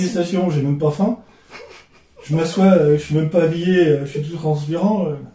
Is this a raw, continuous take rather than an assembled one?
yes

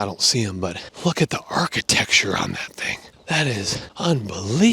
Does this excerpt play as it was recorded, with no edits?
no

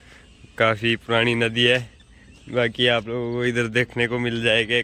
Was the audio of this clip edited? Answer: no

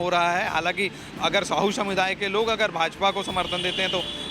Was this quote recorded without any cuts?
no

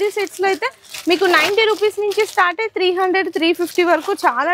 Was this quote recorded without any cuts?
yes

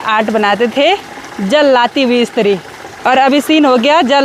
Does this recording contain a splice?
no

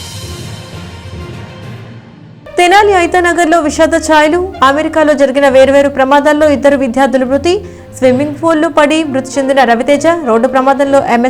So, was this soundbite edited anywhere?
yes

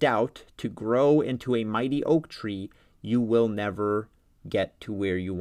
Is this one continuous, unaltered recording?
yes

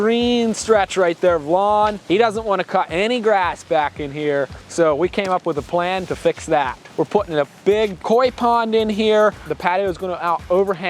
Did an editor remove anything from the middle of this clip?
yes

